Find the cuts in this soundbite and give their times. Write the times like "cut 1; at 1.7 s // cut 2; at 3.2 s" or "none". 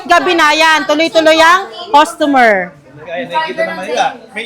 none